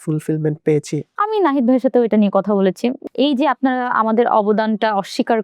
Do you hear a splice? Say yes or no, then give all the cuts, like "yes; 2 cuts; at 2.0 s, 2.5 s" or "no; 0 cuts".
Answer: yes; 2 cuts; at 1.1 s, 3.0 s